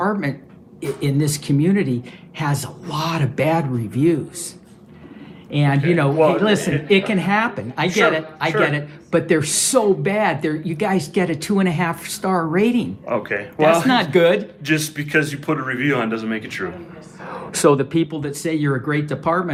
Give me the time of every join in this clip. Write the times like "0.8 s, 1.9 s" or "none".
none

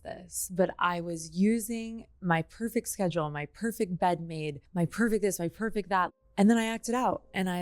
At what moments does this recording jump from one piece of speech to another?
4.6 s, 6.1 s

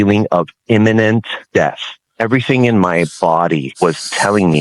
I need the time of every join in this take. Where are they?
1.7 s, 3.7 s

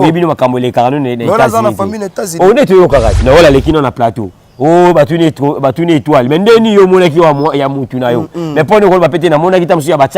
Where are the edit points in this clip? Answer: 3.1 s

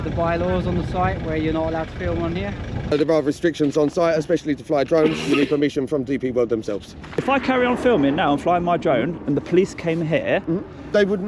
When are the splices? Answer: 2.9 s, 7.2 s

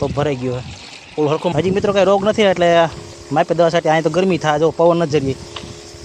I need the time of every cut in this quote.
1.5 s

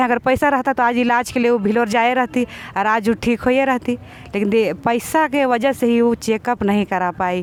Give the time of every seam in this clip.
none

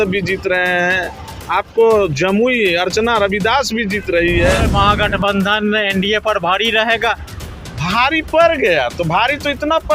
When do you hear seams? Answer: 4.7 s

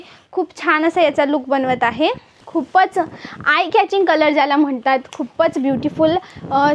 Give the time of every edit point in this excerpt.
2.4 s

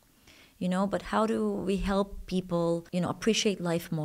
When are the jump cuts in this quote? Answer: 2.9 s

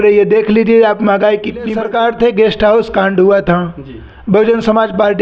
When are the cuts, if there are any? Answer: 1.7 s

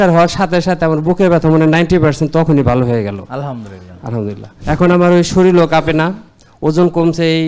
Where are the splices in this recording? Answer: 4.5 s

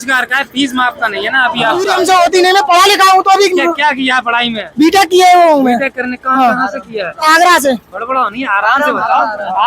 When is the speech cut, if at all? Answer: 1.9 s

